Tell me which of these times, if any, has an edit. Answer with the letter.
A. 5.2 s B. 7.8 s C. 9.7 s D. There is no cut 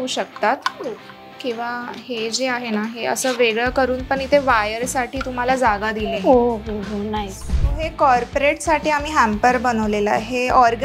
B